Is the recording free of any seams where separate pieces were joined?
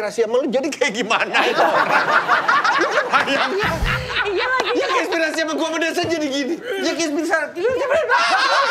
yes; 0 cuts

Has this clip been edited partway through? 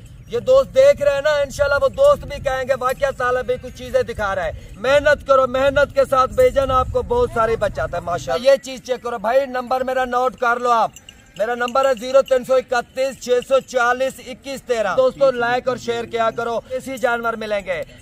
yes; 4 cuts; at 4.6 s, 8.4 s, 14.9 s, 16.9 s

